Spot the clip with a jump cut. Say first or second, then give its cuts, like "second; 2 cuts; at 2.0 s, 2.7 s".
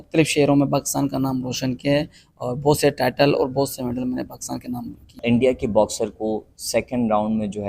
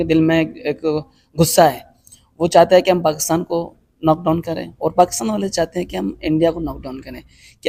first; 1 cut; at 5.2 s